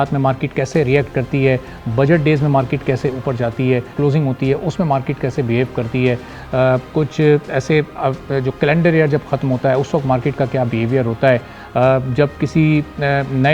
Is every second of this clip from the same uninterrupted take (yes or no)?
yes